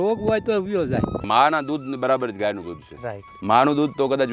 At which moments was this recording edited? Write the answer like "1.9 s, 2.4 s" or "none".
1.2 s

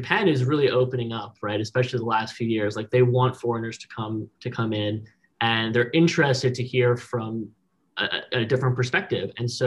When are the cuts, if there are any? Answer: none

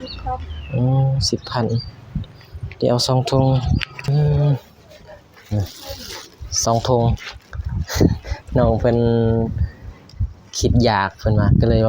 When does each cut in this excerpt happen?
4.1 s

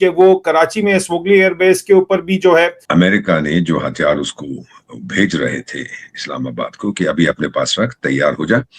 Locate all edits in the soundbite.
2.8 s

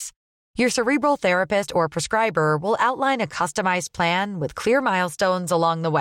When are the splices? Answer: none

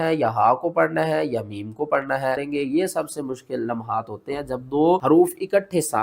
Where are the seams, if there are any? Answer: 2.4 s, 5.0 s

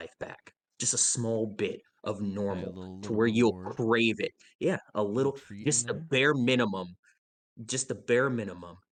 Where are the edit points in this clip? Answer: none

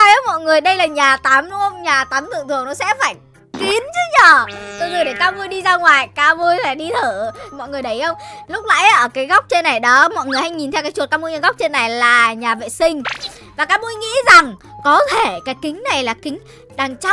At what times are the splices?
7.5 s

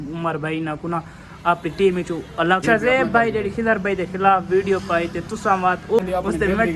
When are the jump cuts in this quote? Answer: 2.6 s, 6.0 s

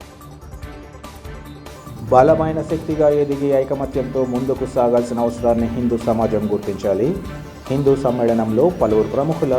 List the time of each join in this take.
1.7 s

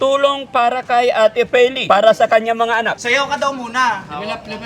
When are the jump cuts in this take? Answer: 1.8 s, 3.0 s

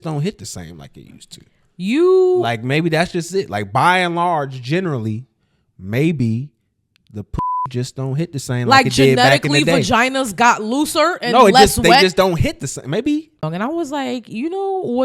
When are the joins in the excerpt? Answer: 13.4 s

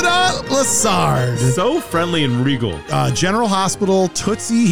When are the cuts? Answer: 2.8 s

